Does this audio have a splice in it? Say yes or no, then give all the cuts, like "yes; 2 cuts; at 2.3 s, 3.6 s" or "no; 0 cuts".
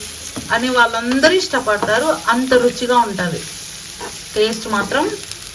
no; 0 cuts